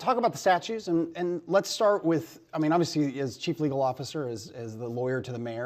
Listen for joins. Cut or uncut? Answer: cut